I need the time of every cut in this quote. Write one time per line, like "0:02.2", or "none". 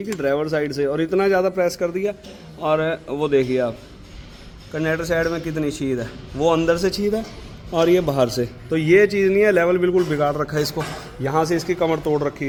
none